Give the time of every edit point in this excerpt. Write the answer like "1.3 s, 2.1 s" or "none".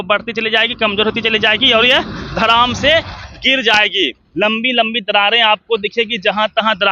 4.2 s

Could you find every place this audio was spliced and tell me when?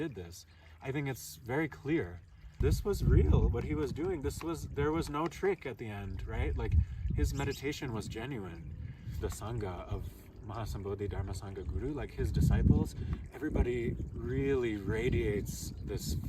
2.4 s, 9.2 s

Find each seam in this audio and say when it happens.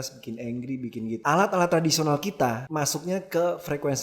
1.2 s, 2.6 s

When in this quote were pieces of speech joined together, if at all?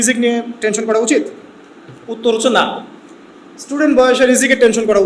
none

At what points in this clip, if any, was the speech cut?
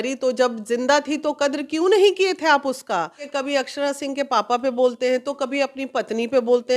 3.3 s

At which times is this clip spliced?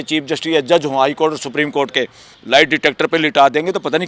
2.3 s

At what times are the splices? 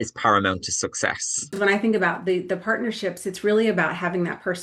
1.5 s

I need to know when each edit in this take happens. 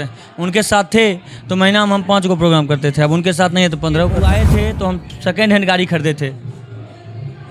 4.5 s

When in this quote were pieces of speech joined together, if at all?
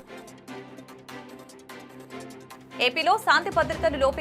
2.0 s, 2.8 s

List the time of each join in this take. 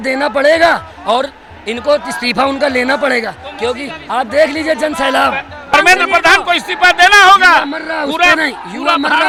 none

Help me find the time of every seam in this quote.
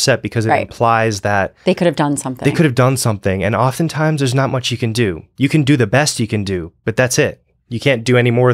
none

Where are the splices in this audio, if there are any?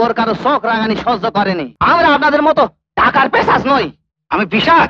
1.7 s

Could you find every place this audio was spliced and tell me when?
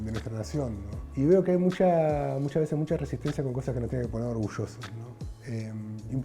1.1 s

